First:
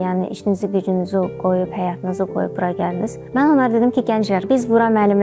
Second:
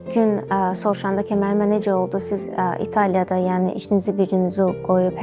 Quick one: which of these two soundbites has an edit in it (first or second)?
first